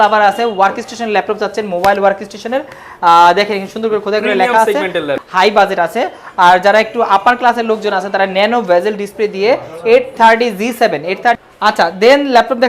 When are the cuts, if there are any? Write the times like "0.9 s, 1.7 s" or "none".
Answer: 5.2 s, 11.5 s